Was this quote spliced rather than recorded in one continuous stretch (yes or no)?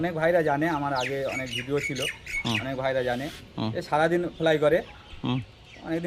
no